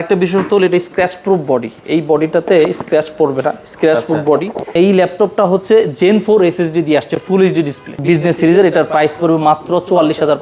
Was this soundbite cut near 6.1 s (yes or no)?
no